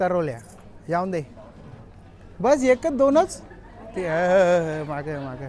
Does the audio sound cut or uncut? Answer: uncut